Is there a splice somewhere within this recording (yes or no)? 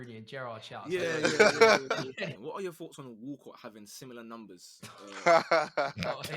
yes